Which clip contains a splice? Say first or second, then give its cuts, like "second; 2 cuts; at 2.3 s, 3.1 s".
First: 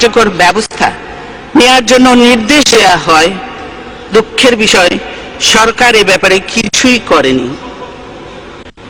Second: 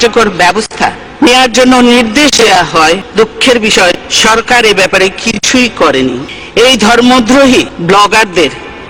second; 5 cuts; at 1.0 s, 3.1 s, 4.1 s, 6.3 s, 7.7 s